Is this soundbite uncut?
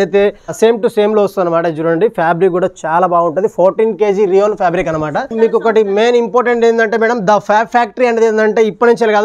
no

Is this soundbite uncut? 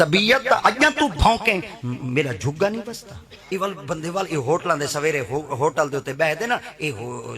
no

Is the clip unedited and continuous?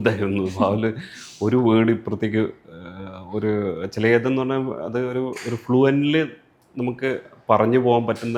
yes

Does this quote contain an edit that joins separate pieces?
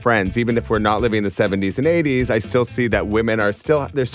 no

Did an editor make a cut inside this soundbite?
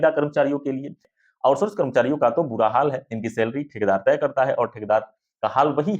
yes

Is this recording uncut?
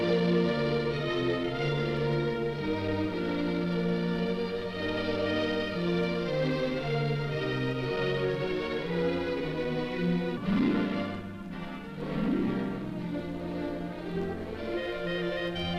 yes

